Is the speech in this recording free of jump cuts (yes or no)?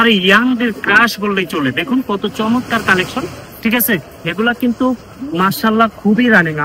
yes